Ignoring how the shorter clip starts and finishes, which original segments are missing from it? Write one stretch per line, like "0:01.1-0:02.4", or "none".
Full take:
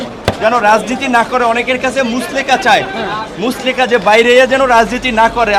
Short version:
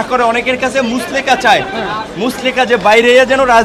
none